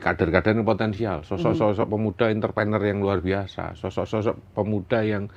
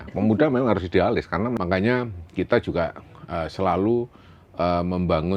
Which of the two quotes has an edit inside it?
second; 1 cut; at 1.6 s

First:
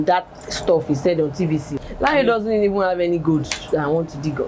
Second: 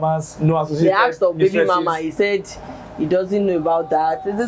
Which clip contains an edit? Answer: first; 1 cut; at 1.7 s

